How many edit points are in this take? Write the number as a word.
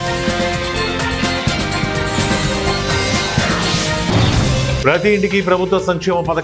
one